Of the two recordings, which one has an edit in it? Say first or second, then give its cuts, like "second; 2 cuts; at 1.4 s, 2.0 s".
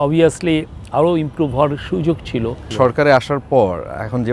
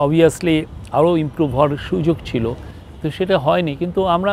first; 1 cut; at 2.7 s